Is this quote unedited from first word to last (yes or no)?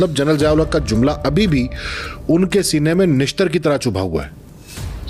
yes